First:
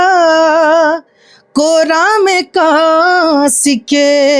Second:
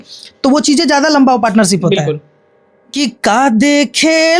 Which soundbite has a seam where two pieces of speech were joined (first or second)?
second